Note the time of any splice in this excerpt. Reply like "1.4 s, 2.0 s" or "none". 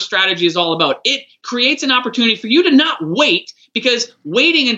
1.4 s